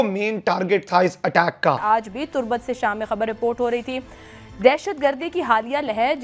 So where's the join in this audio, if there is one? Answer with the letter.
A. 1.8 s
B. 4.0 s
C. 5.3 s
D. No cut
A